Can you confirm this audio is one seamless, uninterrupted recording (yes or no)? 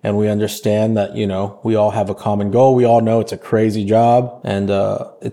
yes